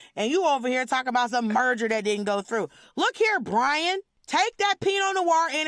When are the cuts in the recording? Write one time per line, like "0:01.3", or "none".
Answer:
0:04.1